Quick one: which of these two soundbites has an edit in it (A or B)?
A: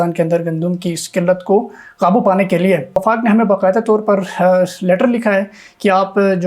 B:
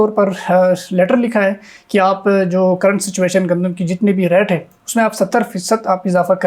A